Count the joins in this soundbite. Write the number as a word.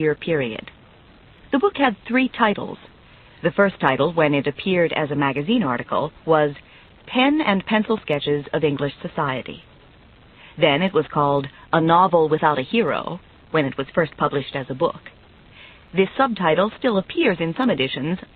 one